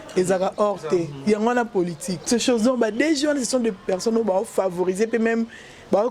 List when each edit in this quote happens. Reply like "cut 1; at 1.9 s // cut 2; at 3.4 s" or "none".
cut 1; at 2.3 s